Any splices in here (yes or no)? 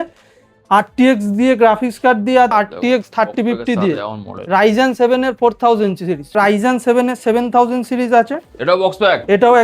yes